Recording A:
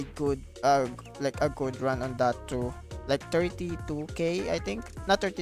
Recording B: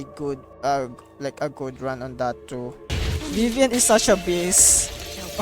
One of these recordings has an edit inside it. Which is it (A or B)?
B